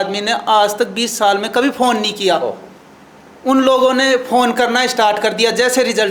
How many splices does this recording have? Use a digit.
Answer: 0